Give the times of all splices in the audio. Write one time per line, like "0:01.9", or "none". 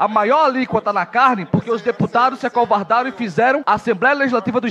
none